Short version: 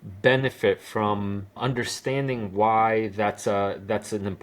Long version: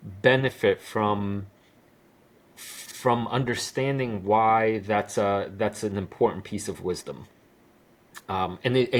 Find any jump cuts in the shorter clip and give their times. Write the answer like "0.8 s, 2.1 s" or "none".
1.6 s